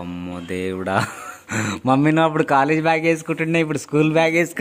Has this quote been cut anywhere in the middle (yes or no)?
no